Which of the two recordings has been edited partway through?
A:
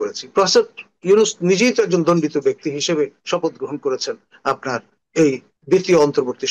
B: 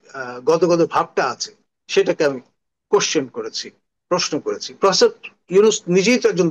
A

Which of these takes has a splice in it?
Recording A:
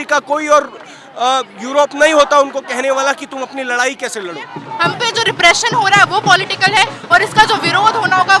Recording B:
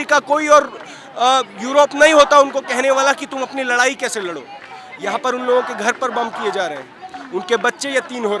A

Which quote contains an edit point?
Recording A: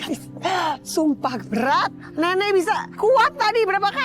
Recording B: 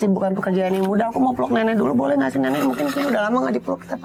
A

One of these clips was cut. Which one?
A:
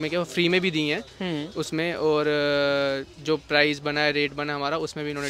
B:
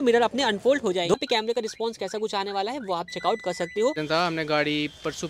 B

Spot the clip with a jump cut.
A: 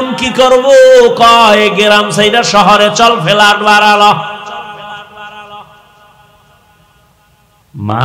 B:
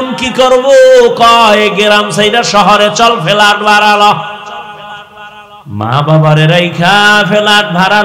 B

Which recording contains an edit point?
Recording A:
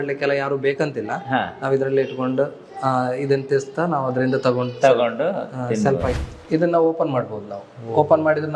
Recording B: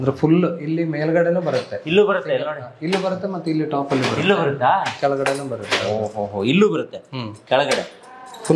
A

